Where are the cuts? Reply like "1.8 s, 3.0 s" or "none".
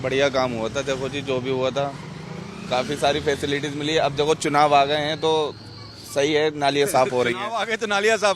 none